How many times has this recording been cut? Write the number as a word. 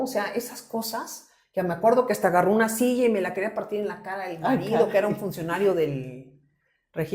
zero